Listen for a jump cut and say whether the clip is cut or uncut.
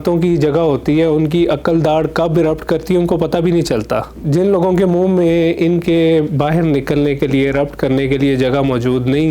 cut